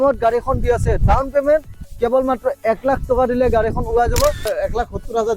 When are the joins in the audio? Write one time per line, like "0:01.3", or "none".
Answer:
0:04.5